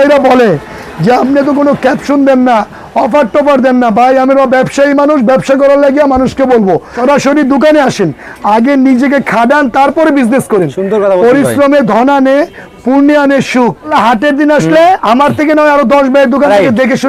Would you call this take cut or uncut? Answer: cut